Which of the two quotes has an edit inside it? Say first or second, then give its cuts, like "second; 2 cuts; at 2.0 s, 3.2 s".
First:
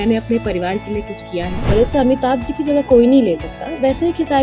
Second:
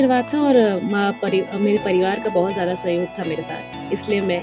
first; 1 cut; at 1.6 s